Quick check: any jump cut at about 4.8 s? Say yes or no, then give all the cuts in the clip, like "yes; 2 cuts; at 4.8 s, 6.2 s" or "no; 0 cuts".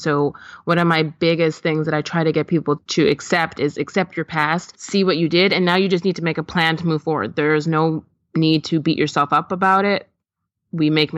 yes; 2 cuts; at 2.9 s, 4.8 s